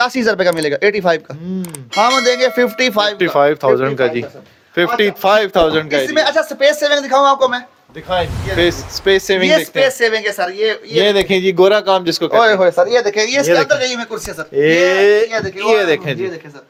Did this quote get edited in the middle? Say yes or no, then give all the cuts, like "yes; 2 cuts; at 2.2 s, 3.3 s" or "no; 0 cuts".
no; 0 cuts